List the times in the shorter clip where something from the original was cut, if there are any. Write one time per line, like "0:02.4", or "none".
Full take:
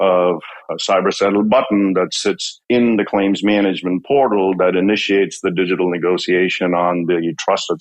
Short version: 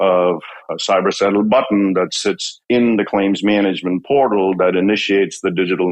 none